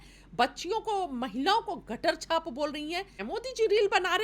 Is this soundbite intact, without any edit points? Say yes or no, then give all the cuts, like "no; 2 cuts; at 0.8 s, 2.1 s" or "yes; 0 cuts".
no; 1 cut; at 3.2 s